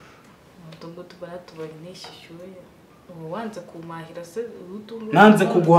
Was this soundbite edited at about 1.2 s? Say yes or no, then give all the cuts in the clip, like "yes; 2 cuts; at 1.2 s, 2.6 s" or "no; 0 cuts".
no; 1 cut; at 2.9 s